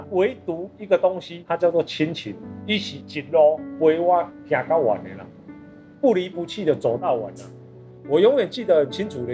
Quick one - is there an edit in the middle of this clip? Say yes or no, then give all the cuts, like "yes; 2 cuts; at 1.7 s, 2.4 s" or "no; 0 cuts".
no; 0 cuts